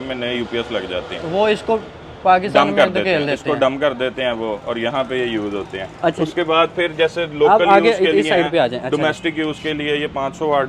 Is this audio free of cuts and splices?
yes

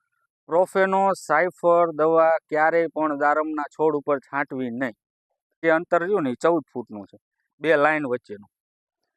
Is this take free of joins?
no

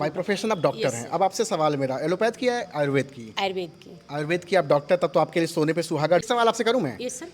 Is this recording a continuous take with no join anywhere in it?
no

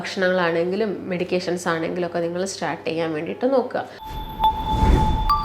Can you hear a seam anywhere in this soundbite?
yes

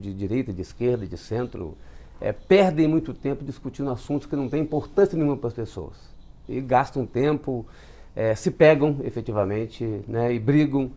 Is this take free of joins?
yes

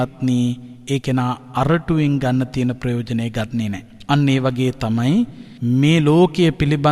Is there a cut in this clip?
yes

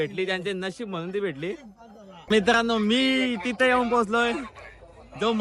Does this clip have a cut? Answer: yes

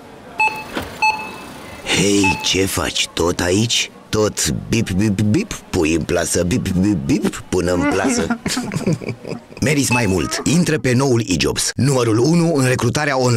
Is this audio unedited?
yes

